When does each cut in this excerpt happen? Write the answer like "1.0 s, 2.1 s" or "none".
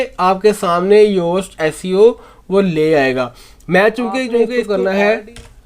4.6 s